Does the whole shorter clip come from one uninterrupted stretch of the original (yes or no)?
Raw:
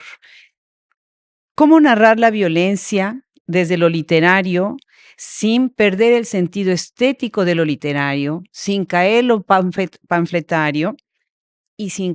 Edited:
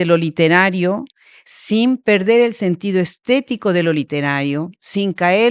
yes